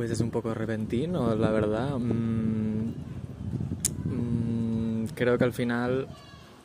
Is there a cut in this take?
no; 0 cuts

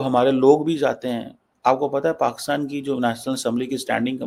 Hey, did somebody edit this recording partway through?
no; 0 cuts

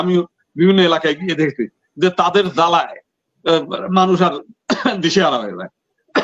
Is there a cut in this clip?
no; 0 cuts

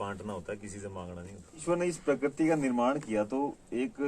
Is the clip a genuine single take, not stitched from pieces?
no; 1 cut; at 1.6 s

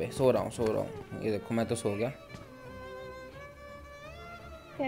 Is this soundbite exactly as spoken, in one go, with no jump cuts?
yes; 0 cuts

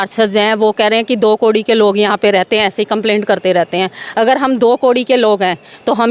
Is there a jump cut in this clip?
no; 0 cuts

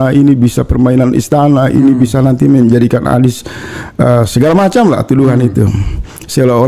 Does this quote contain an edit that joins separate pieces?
no; 0 cuts

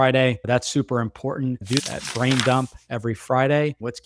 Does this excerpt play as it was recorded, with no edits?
no; 1 cut; at 1.6 s

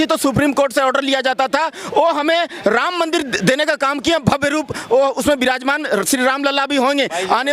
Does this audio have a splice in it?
no; 0 cuts

